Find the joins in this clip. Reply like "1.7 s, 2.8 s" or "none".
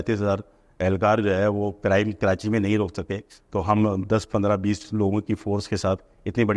none